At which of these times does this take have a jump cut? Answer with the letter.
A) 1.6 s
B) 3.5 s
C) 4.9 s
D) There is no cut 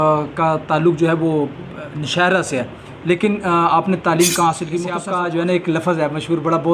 C